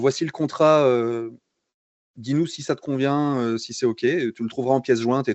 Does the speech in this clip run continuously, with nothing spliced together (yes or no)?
yes